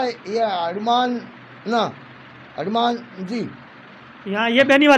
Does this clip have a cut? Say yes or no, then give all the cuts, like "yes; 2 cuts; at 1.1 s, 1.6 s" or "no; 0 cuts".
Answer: no; 0 cuts